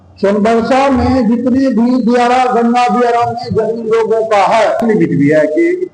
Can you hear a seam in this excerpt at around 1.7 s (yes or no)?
no